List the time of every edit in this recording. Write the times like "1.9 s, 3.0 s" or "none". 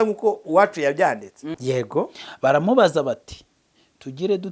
1.5 s